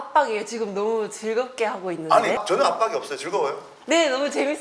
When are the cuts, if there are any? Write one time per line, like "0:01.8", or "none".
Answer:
0:02.4